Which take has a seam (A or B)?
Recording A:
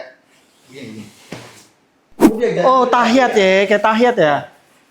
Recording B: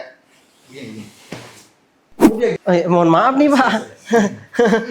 B